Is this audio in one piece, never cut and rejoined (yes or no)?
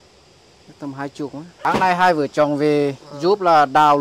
no